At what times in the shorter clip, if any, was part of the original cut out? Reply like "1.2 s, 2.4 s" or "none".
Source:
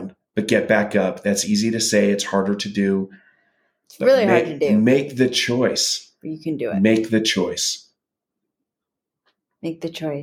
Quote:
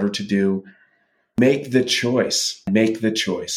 1.4 s, 2.6 s